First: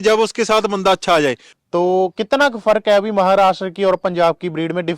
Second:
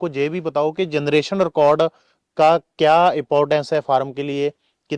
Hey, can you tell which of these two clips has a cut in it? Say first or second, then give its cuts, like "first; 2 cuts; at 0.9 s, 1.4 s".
first; 1 cut; at 1.5 s